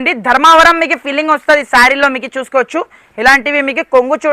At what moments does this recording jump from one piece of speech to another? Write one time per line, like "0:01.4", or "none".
none